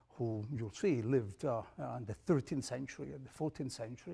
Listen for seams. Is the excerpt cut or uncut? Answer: cut